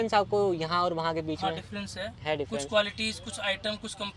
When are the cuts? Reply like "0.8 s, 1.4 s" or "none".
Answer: none